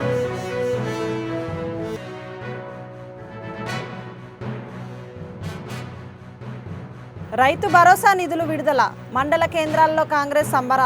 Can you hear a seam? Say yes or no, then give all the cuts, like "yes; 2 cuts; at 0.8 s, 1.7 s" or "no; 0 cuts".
yes; 1 cut; at 1.9 s